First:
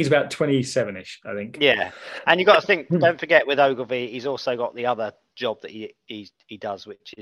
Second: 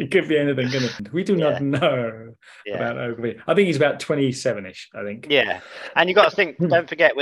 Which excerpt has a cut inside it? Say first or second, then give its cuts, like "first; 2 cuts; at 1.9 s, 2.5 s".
second; 1 cut; at 1.0 s